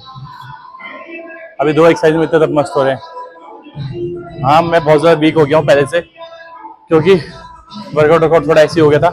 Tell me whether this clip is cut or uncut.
uncut